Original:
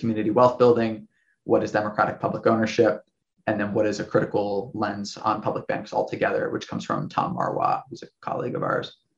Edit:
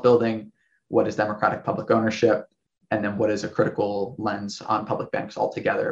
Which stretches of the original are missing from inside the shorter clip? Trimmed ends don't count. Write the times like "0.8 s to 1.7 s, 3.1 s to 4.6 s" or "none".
none